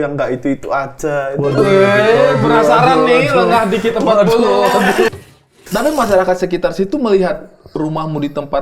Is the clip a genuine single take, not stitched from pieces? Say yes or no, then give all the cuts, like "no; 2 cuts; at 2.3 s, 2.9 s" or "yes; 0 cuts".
no; 1 cut; at 5.1 s